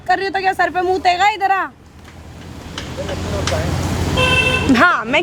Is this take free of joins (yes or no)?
yes